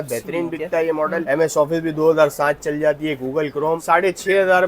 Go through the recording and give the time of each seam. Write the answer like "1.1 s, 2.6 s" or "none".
1.2 s, 3.8 s